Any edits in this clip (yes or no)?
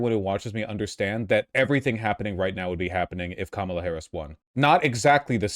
yes